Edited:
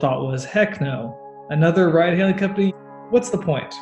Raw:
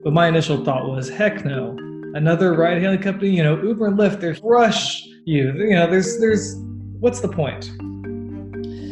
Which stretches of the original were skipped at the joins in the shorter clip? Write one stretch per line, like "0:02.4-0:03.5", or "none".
0:03.3-0:06.6